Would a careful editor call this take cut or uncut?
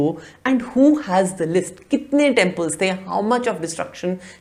uncut